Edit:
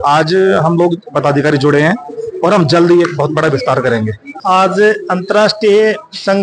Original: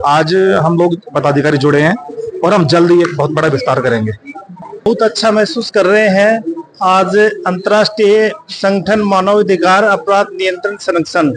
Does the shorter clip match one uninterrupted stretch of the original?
no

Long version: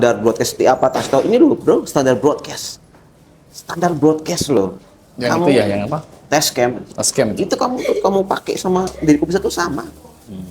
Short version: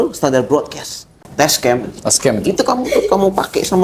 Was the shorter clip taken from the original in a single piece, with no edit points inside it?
no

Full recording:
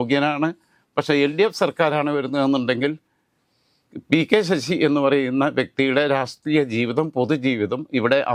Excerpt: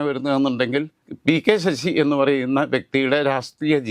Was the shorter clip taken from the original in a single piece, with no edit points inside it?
no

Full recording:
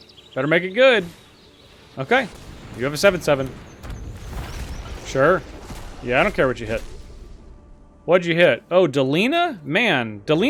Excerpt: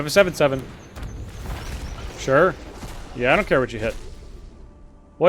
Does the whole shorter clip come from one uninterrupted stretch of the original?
yes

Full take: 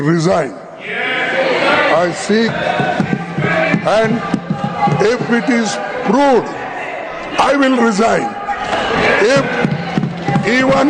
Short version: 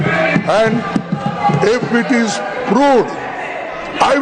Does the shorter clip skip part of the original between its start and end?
no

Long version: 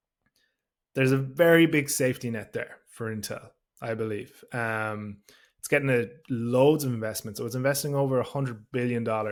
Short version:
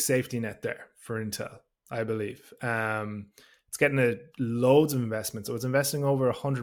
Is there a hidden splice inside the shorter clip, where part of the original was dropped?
no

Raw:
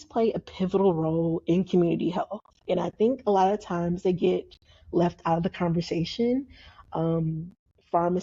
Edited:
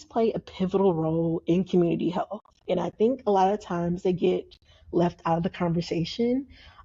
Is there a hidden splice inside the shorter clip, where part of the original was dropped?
no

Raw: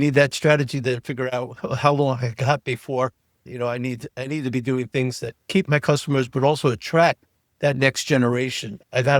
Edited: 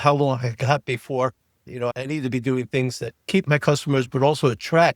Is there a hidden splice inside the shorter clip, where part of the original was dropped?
yes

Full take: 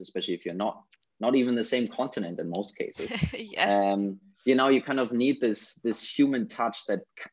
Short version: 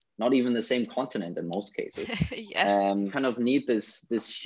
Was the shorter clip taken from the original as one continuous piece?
no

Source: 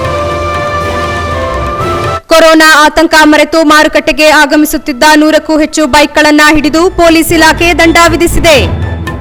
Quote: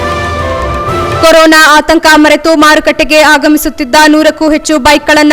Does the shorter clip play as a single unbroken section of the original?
no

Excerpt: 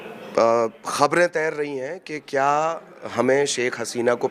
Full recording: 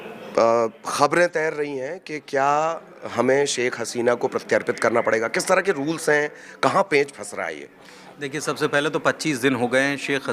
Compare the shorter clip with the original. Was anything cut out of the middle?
no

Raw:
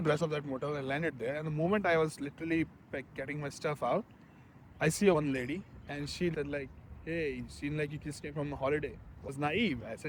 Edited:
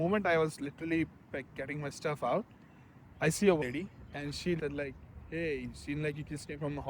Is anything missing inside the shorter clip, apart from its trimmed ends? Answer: yes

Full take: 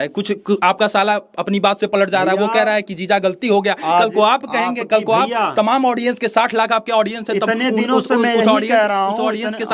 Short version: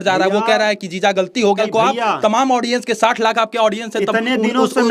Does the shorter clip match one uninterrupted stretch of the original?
no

